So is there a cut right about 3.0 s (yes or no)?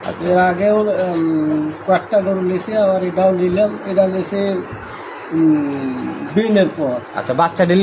no